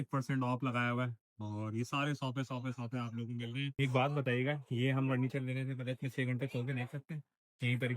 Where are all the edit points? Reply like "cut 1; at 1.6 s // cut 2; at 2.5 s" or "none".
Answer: cut 1; at 3.8 s